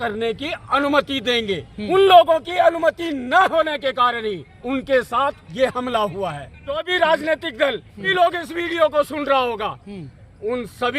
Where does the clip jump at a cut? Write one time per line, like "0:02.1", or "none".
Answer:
0:01.7
0:04.6
0:06.8
0:08.1